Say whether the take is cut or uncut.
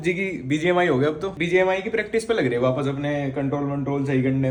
uncut